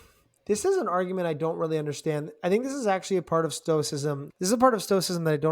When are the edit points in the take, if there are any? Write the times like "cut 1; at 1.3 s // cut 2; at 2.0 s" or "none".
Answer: cut 1; at 4.3 s